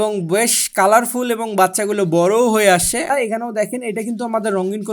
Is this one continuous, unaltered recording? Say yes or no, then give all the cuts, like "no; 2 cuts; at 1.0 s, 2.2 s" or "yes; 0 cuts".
no; 1 cut; at 3.1 s